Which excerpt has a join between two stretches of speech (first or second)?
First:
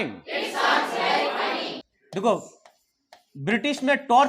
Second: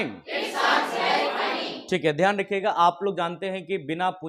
first